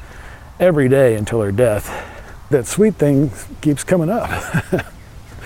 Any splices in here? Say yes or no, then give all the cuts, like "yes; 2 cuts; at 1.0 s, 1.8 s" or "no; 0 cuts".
yes; 1 cut; at 2.4 s